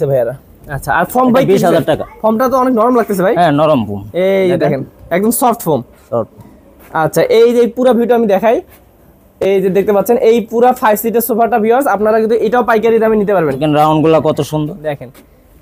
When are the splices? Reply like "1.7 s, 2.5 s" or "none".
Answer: none